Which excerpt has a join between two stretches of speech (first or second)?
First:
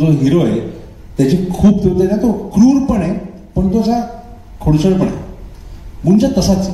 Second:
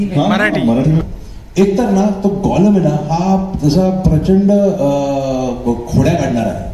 second